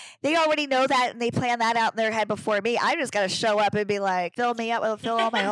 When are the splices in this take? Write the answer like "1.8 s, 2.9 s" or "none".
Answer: 4.3 s